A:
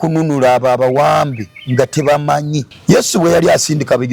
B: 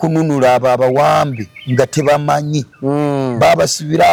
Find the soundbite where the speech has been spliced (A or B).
A